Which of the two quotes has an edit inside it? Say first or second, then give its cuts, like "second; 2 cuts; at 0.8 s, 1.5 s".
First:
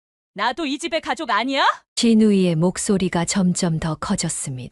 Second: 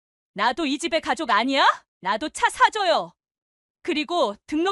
second; 1 cut; at 1.9 s